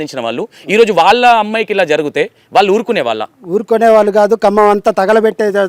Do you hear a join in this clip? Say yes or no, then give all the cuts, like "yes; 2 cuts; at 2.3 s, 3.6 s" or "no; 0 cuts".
no; 0 cuts